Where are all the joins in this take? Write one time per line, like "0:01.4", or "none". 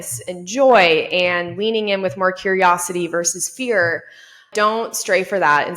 0:04.5